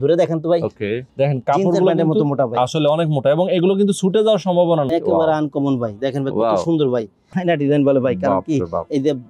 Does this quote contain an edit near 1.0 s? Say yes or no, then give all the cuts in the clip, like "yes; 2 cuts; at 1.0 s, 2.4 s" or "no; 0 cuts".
yes; 3 cuts; at 1.0 s, 4.9 s, 7.2 s